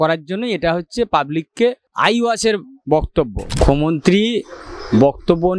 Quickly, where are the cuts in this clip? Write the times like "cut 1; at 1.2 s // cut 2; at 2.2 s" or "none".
cut 1; at 1.9 s // cut 2; at 3.4 s

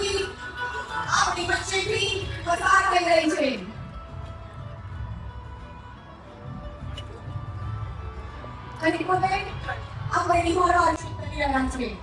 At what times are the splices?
cut 1; at 11.1 s

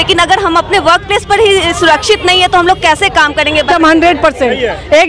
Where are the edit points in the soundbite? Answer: cut 1; at 3.7 s

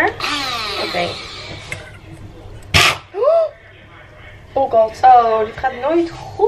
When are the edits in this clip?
cut 1; at 4.9 s

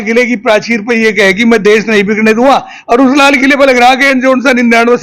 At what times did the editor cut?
none

